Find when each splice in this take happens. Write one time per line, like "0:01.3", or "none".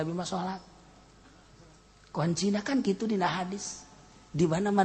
none